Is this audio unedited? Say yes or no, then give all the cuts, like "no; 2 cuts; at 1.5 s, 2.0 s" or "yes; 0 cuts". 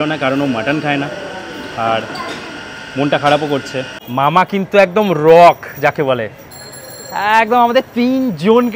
no; 1 cut; at 4.0 s